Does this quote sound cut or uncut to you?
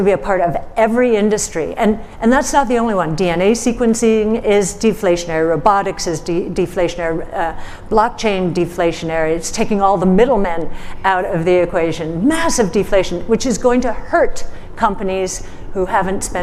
uncut